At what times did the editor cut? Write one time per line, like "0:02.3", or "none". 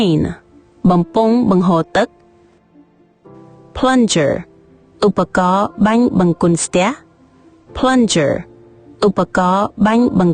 0:02.2